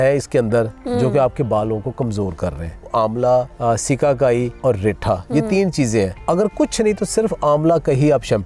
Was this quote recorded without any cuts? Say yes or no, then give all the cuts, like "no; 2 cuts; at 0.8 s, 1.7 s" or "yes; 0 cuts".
no; 4 cuts; at 2.9 s, 3.5 s, 4.5 s, 6.2 s